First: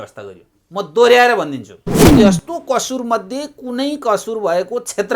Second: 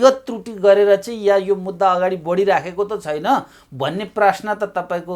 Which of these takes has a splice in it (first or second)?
first